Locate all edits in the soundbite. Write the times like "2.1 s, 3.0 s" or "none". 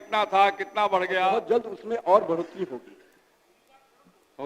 1.3 s